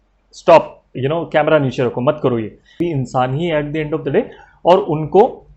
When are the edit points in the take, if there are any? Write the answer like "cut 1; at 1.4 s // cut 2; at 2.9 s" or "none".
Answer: cut 1; at 2.8 s